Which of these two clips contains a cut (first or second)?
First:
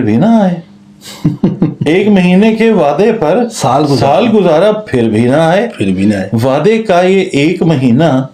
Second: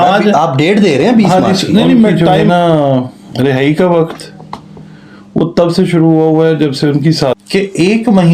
second